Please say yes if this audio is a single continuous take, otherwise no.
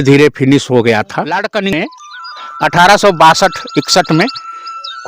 no